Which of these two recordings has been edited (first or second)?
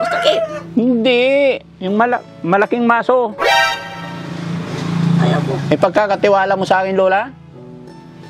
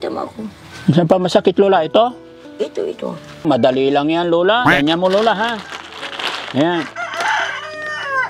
second